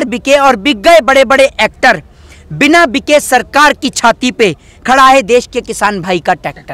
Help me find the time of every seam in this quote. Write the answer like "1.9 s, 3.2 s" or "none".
none